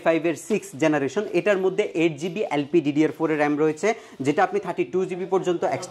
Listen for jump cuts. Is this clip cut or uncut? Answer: uncut